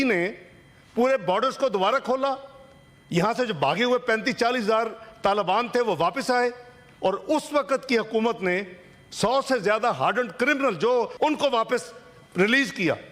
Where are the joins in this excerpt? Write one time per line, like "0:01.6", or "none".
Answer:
0:11.1